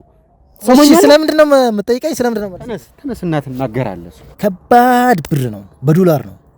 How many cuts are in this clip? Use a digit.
1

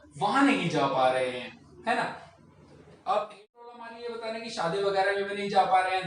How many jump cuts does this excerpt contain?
1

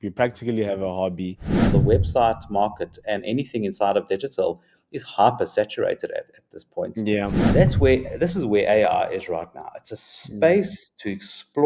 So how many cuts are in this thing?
2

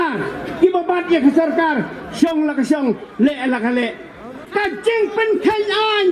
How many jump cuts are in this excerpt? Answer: 1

